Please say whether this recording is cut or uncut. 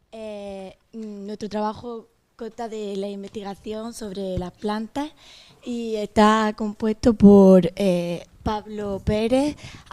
cut